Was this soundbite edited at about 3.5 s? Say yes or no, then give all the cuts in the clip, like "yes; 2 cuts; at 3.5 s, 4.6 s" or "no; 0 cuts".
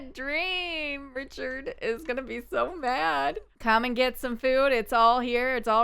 yes; 1 cut; at 3.5 s